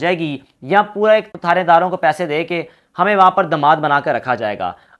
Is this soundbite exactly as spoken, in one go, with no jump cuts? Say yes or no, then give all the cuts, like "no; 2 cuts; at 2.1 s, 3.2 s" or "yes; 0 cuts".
no; 1 cut; at 1.3 s